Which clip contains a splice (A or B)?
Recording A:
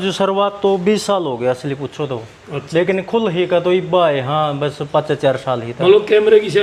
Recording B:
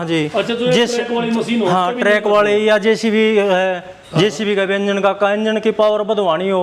B